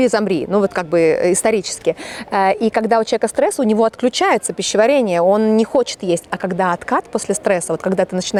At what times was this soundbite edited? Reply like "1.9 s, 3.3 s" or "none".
none